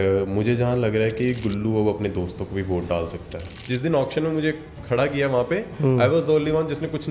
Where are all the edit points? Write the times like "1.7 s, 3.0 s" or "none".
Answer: 3.6 s